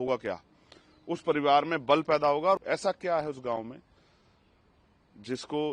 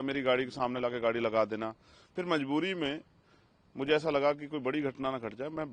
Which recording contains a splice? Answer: first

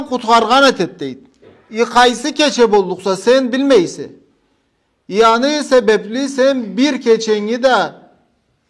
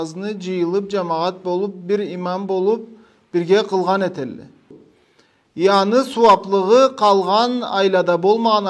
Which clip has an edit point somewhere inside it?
second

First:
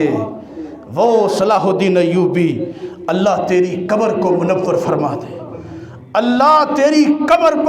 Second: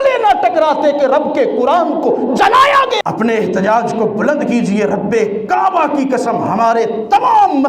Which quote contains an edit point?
second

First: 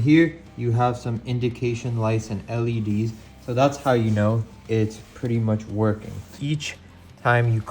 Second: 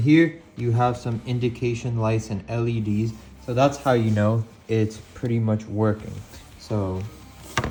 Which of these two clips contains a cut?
first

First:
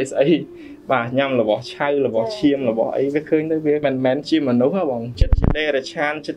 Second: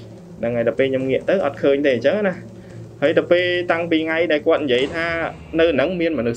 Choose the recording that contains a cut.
first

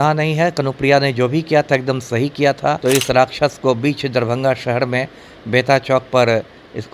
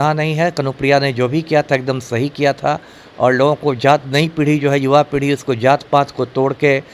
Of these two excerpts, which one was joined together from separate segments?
first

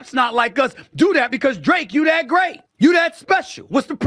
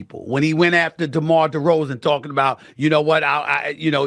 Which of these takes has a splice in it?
first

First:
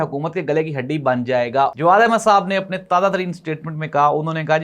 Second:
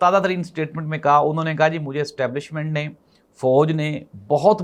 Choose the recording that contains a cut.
first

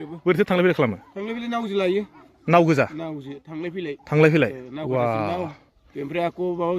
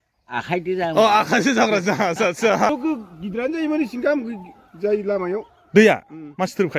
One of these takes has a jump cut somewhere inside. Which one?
second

